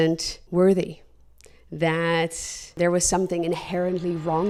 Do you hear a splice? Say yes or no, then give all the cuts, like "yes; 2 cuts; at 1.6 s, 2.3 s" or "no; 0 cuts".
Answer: no; 0 cuts